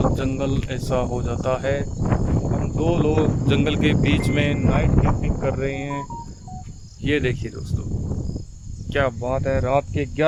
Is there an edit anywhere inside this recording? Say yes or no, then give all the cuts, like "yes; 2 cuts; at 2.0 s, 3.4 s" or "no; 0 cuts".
no; 0 cuts